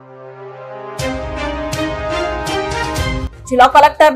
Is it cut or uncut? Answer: uncut